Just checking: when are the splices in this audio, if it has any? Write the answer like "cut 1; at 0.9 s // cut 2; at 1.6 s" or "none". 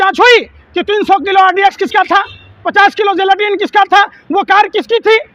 none